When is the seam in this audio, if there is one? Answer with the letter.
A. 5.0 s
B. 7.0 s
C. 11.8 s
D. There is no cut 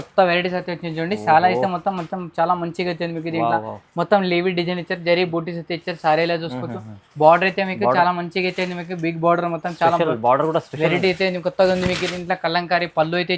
D